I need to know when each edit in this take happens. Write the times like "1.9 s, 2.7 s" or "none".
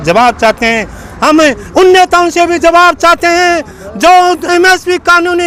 none